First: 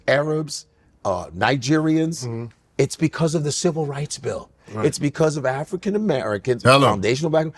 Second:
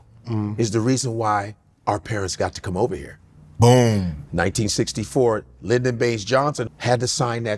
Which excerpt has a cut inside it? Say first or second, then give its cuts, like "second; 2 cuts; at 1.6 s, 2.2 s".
second; 1 cut; at 6.7 s